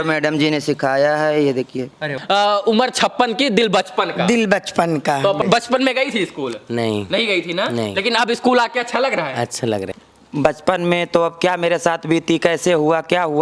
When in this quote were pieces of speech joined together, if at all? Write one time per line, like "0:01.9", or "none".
0:02.1
0:05.4
0:10.0